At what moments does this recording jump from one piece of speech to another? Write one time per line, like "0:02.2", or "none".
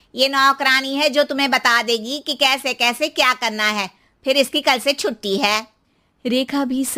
none